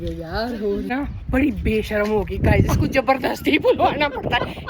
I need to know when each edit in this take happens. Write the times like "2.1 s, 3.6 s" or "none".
0.9 s